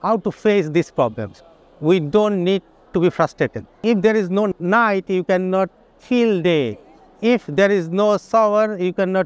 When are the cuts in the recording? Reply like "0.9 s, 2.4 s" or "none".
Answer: 3.8 s